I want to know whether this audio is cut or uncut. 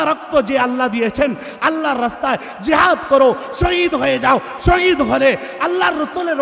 uncut